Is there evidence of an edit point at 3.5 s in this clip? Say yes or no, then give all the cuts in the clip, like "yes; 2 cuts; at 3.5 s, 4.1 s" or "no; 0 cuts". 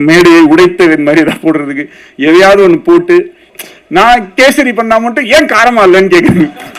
yes; 1 cut; at 3.5 s